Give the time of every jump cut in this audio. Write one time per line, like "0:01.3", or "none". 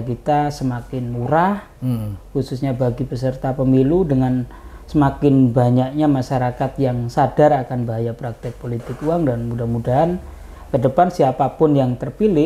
none